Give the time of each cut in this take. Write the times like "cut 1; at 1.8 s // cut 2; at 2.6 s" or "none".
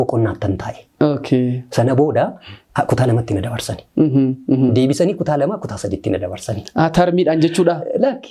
none

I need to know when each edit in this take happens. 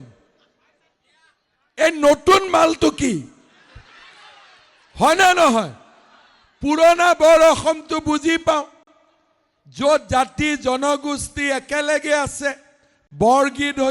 cut 1; at 3.0 s

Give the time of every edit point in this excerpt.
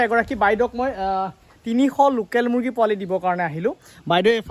none

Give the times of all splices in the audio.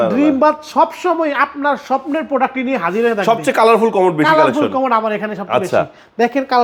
none

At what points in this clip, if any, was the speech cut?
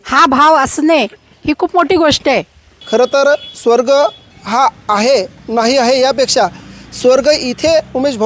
cut 1; at 2.8 s // cut 2; at 4.3 s

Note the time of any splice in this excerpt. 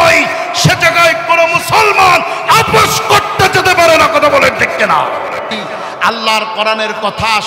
cut 1; at 6.0 s

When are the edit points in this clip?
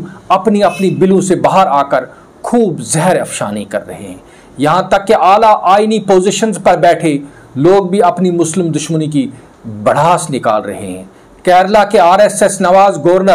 none

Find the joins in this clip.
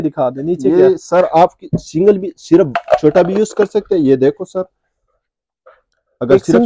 none

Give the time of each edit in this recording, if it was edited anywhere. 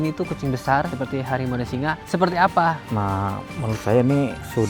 cut 1; at 2.8 s

